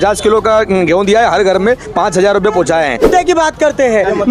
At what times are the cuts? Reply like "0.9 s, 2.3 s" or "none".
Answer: 3.1 s